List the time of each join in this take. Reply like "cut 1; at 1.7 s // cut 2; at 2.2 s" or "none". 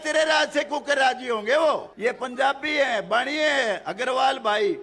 cut 1; at 1.9 s